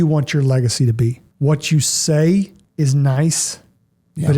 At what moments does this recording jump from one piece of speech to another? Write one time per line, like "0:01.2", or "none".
0:01.2
0:02.6

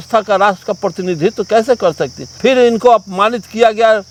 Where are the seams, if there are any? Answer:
none

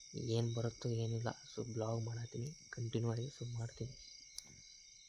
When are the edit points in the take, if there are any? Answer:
none

